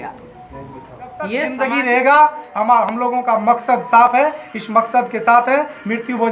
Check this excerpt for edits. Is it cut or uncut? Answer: cut